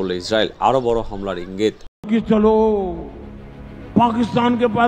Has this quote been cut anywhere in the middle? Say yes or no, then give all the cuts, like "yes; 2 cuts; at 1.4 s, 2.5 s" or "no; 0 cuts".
yes; 1 cut; at 1.9 s